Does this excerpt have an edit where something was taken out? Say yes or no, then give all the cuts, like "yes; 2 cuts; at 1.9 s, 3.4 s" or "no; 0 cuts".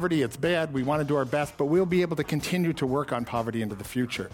no; 0 cuts